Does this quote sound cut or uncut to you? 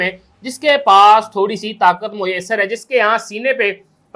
uncut